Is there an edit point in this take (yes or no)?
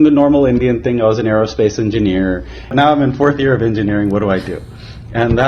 yes